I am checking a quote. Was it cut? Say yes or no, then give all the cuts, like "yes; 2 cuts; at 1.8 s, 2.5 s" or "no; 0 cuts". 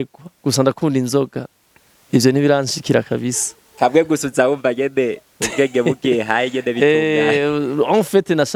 no; 0 cuts